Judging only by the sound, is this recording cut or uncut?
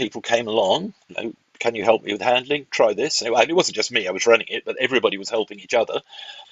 uncut